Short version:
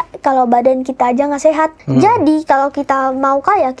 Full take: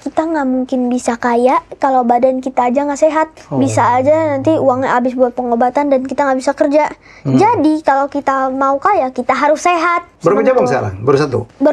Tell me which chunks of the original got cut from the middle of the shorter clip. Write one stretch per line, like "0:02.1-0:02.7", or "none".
0:03.4-0:07.2